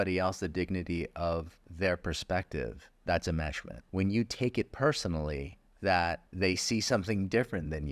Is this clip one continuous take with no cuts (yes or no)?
no